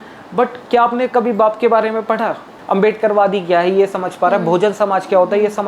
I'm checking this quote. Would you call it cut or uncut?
cut